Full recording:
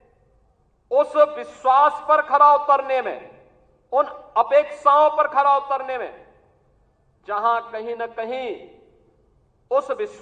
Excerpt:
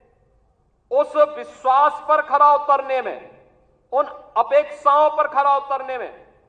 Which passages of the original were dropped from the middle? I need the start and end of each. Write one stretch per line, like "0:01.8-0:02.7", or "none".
none